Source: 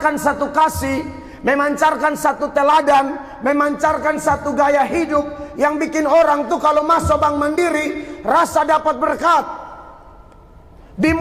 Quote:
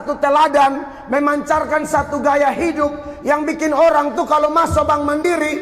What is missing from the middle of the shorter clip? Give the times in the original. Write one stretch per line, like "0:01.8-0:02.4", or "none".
none